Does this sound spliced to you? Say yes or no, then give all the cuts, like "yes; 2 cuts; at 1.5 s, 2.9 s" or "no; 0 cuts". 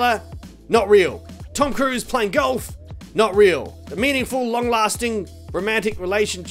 yes; 1 cut; at 3.8 s